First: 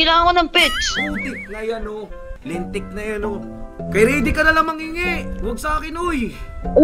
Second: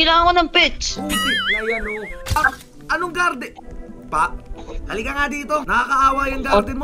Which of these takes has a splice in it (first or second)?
second